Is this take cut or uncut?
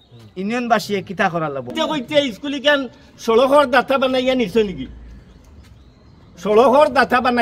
cut